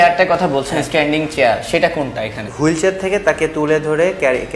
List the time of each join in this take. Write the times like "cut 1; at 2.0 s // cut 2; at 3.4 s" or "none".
cut 1; at 2.4 s